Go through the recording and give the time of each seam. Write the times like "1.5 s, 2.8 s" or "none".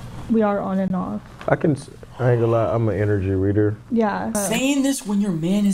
4.4 s

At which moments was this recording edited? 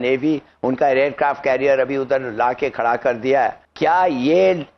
3.6 s

